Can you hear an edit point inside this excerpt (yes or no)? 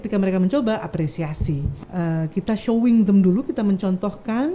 yes